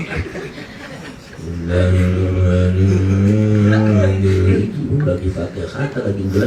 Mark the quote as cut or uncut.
uncut